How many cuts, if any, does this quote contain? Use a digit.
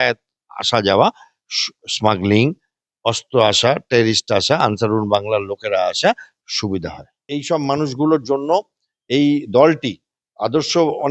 1